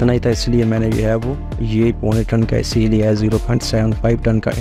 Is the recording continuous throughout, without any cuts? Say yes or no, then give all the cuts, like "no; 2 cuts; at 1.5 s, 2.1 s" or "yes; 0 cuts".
yes; 0 cuts